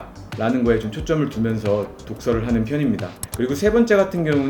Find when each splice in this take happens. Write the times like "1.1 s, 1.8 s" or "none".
none